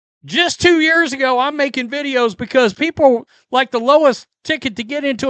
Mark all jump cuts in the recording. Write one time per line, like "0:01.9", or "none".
none